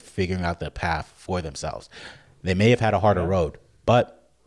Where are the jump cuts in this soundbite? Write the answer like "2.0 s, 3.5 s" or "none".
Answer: none

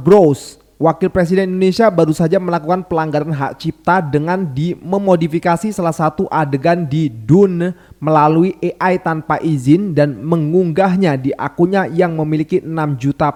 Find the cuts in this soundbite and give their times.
none

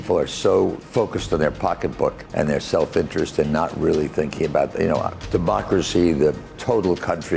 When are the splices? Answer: 0.8 s, 2.2 s, 5.2 s, 6.5 s

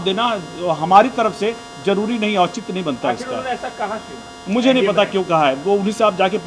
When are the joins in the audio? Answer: none

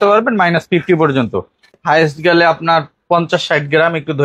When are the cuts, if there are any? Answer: 1.8 s

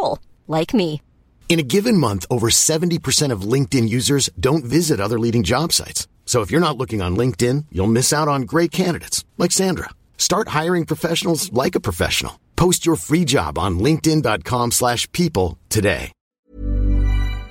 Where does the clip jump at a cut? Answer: 16.3 s

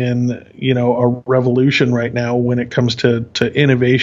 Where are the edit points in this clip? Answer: none

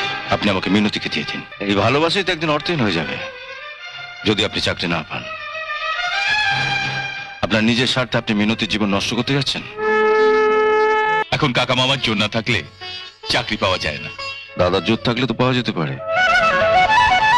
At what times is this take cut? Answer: 1.4 s, 11.2 s

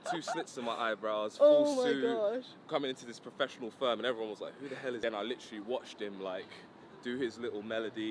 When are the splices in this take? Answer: 5.0 s

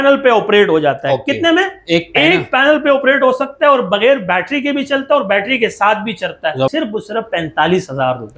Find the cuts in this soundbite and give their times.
6.7 s

